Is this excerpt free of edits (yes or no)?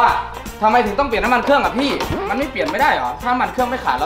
no